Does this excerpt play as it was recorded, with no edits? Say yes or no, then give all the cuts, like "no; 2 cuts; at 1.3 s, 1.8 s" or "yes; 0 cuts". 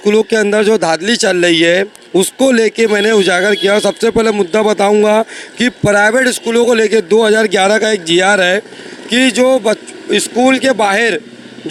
yes; 0 cuts